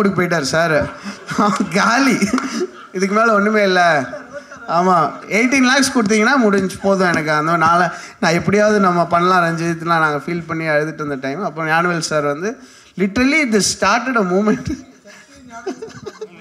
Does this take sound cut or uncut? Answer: uncut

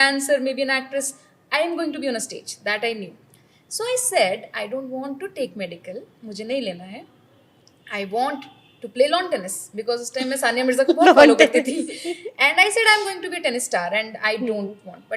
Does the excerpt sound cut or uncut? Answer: uncut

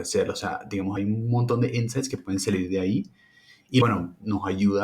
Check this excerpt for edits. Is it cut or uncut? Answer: cut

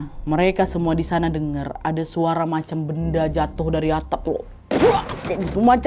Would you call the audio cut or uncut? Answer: uncut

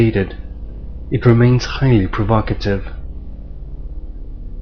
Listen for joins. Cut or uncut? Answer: uncut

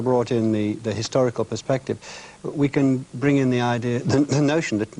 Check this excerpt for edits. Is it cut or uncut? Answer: uncut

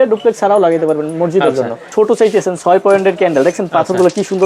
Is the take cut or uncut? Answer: cut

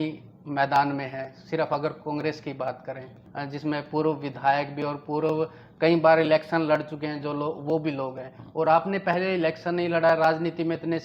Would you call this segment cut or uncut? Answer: cut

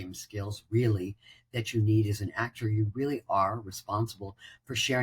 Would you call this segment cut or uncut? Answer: uncut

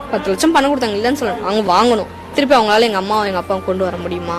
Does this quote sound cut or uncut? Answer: cut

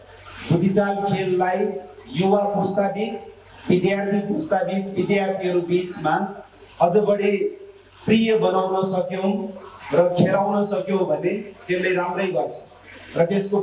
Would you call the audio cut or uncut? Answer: uncut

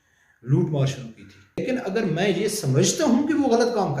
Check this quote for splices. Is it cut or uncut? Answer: cut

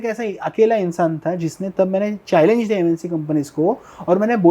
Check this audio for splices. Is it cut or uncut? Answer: uncut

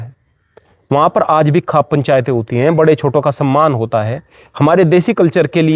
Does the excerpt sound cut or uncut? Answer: uncut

